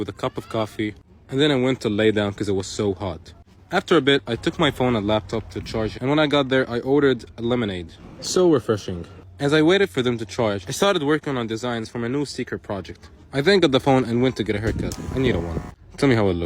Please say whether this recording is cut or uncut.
cut